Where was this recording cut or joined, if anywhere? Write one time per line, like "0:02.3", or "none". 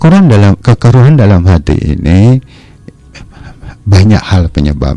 none